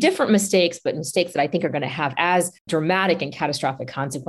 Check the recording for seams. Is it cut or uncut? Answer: uncut